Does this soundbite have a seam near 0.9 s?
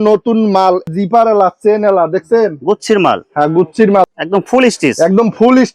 yes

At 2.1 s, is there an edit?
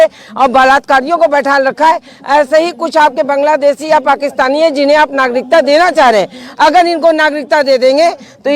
no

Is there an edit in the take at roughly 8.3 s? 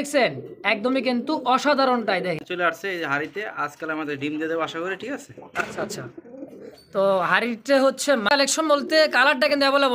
yes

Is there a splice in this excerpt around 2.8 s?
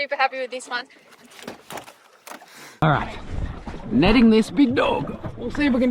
yes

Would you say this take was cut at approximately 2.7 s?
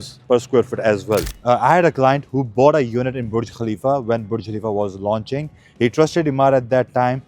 no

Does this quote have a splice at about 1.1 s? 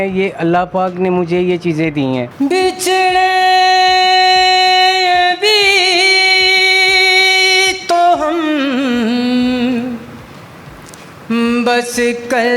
no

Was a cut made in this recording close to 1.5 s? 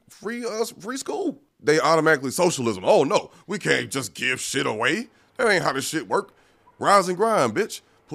yes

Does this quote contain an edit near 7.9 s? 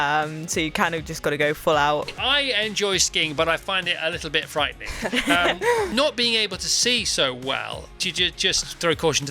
yes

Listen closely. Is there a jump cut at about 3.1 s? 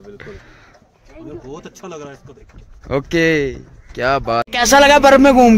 no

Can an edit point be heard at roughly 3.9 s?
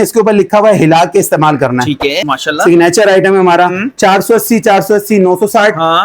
no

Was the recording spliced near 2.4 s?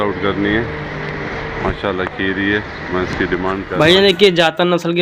no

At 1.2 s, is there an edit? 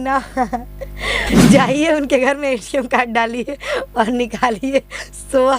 yes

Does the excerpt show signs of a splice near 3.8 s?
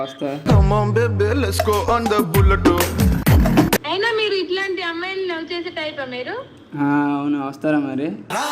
yes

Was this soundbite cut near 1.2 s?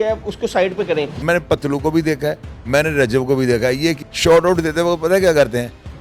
yes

